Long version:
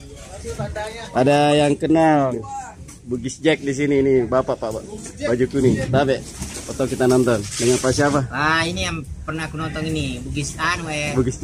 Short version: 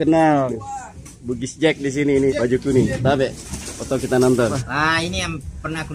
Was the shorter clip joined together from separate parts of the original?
yes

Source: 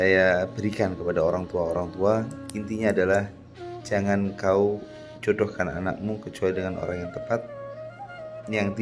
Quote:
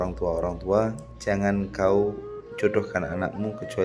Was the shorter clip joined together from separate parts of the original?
yes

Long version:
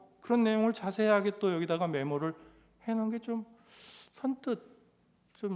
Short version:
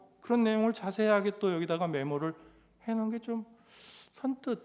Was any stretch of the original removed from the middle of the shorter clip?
no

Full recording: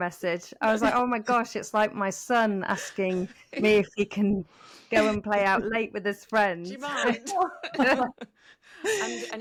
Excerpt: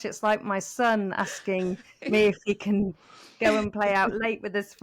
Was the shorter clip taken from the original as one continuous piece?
yes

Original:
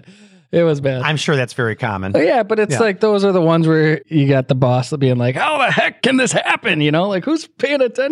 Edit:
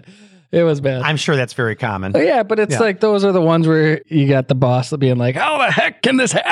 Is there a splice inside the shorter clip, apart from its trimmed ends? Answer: no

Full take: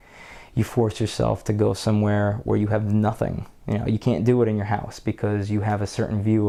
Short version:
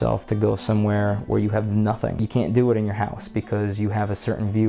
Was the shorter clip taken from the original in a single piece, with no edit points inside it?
no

